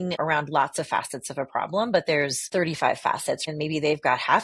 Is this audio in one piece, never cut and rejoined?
no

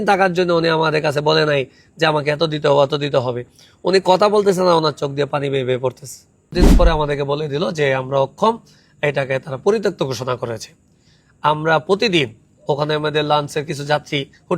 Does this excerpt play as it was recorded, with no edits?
no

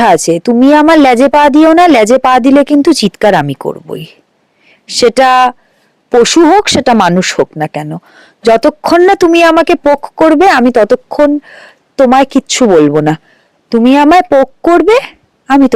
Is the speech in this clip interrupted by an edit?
no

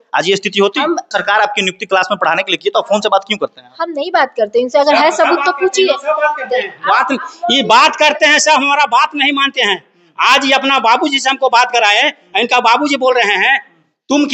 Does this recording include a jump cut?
yes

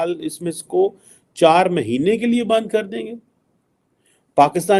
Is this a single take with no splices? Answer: yes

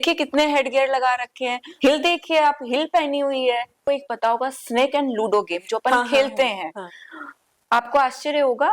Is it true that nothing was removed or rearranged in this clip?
no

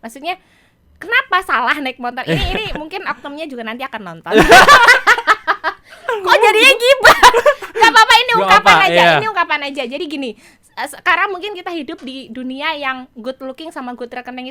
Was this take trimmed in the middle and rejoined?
no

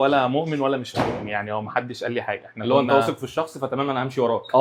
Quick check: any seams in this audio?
no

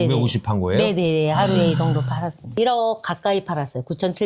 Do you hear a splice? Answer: yes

